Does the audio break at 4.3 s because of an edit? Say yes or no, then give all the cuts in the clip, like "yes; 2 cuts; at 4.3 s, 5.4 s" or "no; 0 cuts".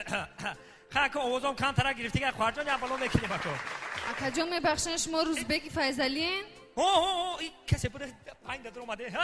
yes; 1 cut; at 4.3 s